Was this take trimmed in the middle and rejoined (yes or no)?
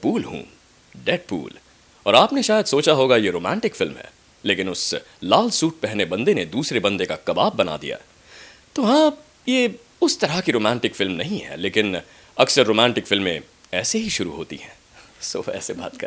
no